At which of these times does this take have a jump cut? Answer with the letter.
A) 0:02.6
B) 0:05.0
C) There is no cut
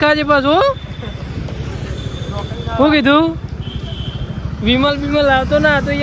C